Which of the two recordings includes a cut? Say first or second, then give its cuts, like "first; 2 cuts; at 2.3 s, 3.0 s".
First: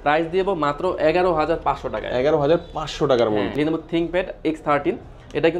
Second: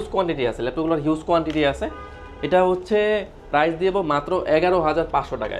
first; 1 cut; at 3.5 s